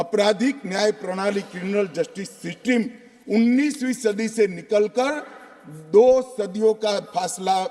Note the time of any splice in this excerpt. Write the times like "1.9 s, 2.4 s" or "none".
none